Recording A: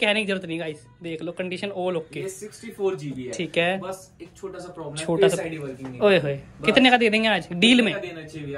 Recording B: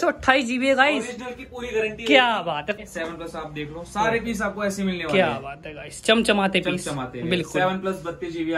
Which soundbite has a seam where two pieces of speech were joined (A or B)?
B